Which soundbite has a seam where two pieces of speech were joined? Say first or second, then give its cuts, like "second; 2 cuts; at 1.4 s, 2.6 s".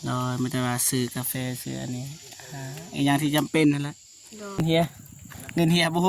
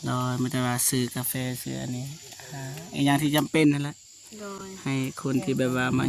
first; 1 cut; at 4.6 s